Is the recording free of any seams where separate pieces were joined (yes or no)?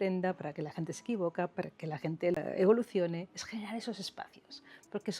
no